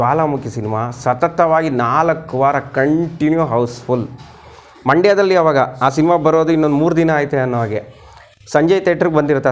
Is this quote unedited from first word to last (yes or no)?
yes